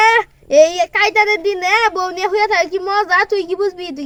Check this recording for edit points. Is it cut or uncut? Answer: uncut